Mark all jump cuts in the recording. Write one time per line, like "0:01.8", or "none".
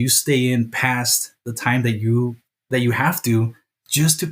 0:02.5